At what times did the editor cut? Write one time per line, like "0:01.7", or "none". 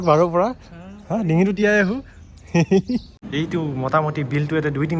0:03.2